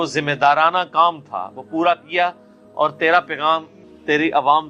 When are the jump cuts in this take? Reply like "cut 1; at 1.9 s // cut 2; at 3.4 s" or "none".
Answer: none